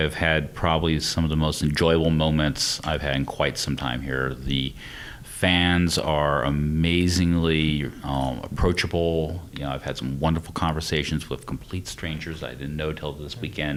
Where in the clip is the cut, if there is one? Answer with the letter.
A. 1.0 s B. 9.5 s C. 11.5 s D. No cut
D